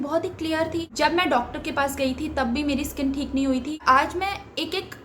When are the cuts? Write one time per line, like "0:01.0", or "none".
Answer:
0:00.9
0:03.7